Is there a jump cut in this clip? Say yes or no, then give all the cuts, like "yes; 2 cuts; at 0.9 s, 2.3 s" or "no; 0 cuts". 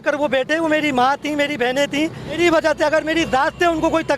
yes; 1 cut; at 2.4 s